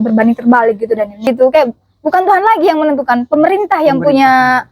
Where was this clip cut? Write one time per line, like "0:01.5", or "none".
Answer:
0:01.3